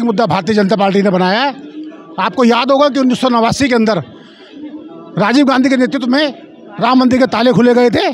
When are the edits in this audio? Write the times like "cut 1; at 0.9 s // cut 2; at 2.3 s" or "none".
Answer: none